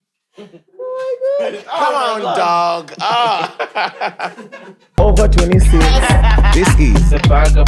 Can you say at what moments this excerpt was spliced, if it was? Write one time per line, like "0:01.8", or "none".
0:04.8